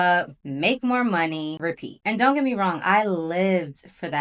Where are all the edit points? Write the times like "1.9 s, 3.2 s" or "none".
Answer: none